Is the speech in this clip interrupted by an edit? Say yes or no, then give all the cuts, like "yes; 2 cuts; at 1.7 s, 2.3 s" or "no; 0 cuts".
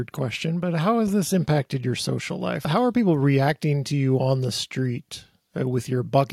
yes; 1 cut; at 2.7 s